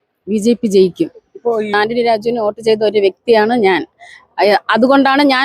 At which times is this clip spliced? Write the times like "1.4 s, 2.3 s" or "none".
1.7 s